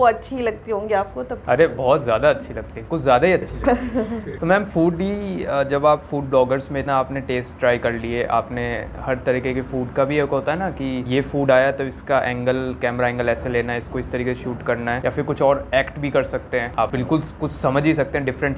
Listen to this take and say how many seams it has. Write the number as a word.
zero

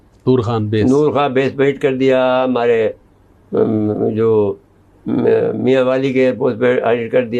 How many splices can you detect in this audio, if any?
zero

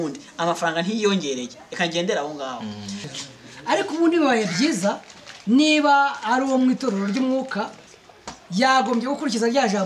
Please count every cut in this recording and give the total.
one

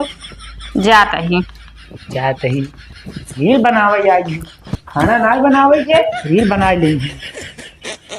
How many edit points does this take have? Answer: one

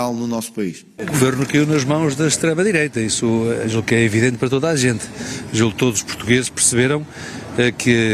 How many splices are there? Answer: one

